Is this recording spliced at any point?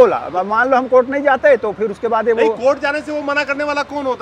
no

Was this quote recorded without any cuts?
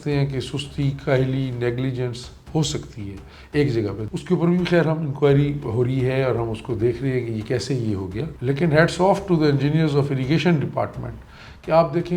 no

